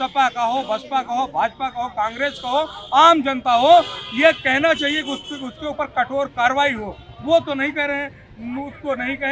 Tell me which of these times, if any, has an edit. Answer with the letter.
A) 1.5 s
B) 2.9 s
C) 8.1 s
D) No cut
D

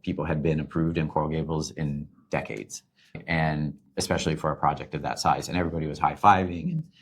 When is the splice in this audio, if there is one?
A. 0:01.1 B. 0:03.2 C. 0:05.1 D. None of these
B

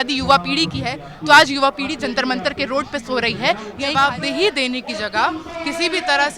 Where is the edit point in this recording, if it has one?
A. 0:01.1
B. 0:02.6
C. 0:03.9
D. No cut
C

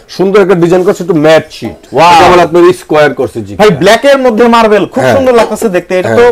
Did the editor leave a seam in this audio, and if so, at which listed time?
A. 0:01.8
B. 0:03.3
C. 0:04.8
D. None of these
A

